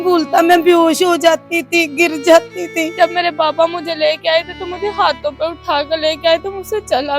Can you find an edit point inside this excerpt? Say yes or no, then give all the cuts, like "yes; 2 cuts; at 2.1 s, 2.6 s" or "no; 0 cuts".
yes; 1 cut; at 2.9 s